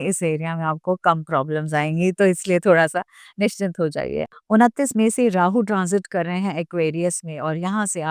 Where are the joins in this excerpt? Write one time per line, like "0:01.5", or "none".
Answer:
0:04.3

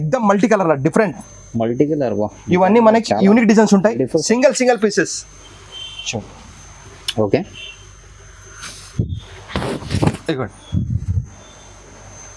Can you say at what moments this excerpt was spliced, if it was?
none

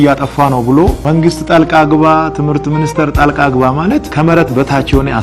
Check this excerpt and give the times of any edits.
0:01.0
0:04.1

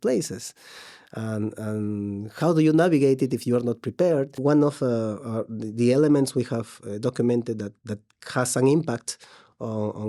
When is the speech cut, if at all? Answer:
0:04.4

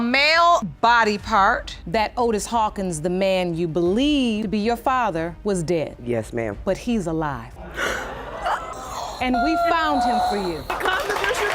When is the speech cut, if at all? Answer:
0:01.7
0:08.8
0:10.7

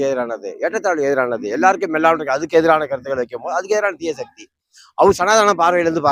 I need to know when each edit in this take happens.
none

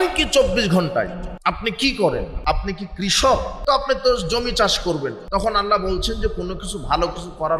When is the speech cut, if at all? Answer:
0:01.3
0:02.3
0:03.5
0:05.2

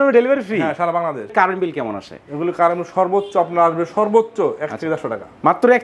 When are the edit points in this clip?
0:01.3

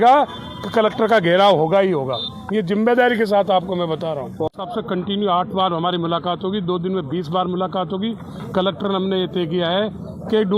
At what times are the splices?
0:04.5

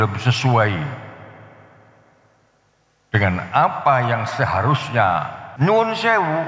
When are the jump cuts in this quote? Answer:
0:05.4

